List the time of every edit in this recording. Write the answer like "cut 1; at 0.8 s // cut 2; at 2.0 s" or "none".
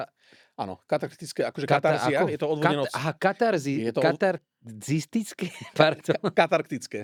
none